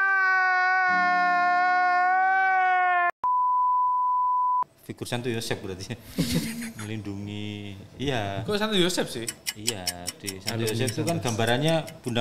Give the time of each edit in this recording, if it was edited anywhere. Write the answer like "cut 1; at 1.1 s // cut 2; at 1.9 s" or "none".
cut 1; at 4.7 s